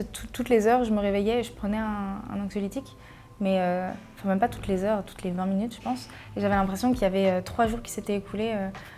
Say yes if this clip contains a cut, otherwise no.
no